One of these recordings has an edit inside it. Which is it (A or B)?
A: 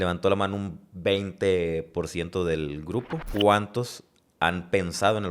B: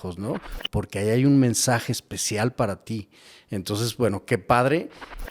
A